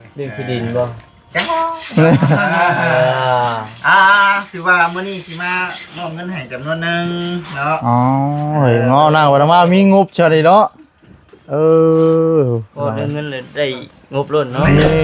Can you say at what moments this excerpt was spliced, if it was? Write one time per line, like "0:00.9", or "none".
none